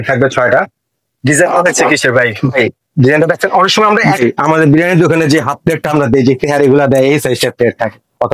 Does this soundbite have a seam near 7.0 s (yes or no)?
no